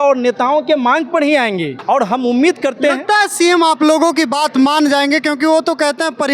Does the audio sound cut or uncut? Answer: cut